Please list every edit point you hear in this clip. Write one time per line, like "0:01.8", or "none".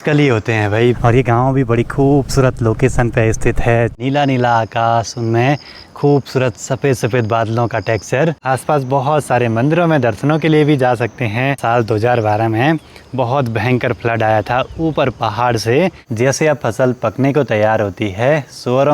0:01.0
0:03.9
0:08.4
0:11.6
0:16.0